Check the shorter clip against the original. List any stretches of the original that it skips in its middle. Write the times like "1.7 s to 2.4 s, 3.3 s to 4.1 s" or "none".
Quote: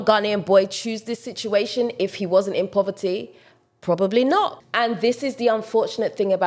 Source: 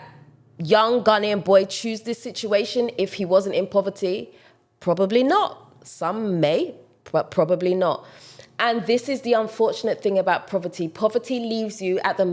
5.6 s to 8.5 s